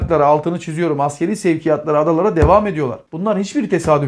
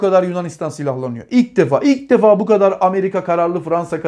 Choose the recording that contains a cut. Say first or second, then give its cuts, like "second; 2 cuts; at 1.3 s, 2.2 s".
first; 1 cut; at 3.0 s